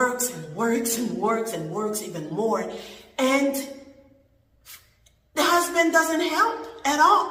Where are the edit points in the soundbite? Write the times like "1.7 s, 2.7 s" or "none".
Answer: none